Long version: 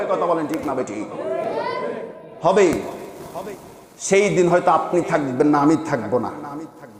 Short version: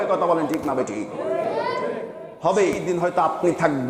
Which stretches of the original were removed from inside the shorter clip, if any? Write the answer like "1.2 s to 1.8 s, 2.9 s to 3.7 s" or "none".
2.9 s to 4.4 s

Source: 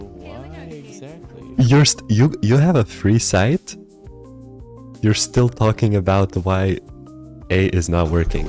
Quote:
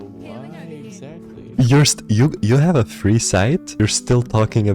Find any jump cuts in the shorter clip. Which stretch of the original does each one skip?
3.7 s to 5.0 s

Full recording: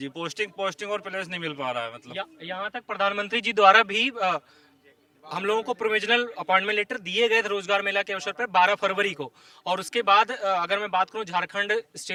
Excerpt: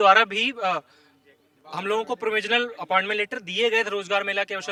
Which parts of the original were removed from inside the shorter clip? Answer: none

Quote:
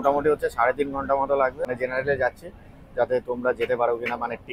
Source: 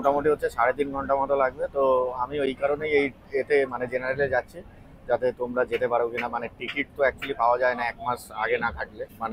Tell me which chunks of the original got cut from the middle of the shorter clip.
1.7 s to 3.8 s

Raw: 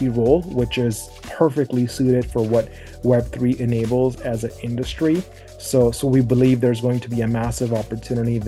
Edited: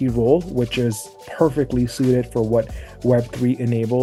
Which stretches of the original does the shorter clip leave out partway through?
none

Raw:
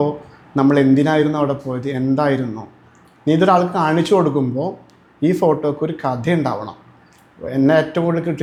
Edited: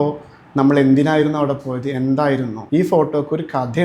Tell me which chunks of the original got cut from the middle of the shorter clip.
2.6 s to 5.1 s

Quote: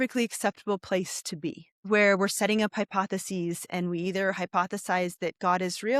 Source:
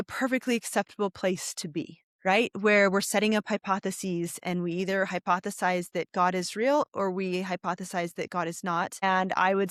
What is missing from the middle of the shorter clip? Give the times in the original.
2.1 s to 2.5 s

